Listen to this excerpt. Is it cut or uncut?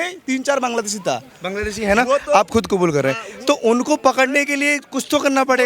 uncut